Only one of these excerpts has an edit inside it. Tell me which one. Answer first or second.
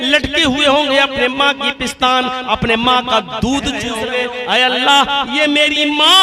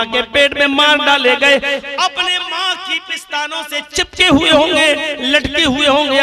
first